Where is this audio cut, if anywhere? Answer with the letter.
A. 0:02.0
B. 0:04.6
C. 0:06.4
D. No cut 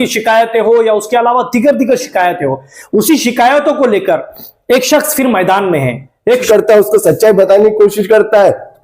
C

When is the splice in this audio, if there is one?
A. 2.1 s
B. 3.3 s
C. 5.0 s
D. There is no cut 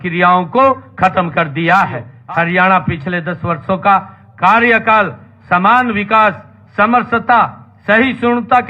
A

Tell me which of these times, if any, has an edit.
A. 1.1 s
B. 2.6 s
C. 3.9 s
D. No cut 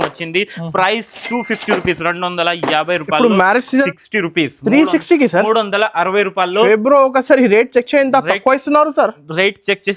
C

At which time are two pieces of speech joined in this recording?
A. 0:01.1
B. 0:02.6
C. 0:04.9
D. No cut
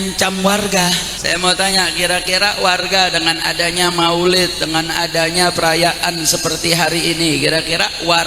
A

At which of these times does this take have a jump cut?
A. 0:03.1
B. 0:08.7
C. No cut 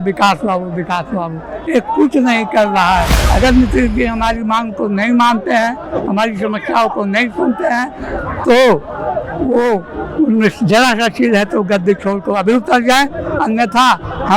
A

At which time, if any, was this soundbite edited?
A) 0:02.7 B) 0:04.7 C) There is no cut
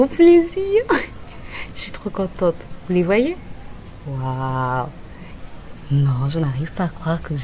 C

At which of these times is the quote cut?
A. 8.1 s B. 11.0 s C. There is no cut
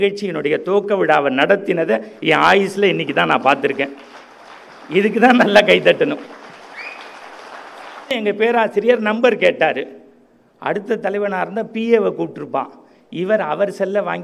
A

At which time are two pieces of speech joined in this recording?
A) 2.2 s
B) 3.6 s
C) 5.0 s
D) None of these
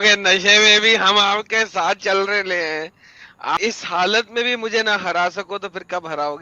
B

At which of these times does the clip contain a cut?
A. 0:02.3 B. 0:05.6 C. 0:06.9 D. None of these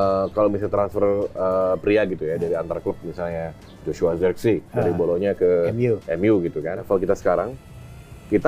C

